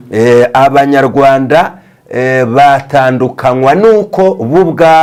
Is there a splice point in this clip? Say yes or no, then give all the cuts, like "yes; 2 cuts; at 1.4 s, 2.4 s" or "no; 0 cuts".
no; 0 cuts